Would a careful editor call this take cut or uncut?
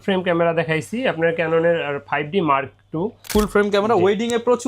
cut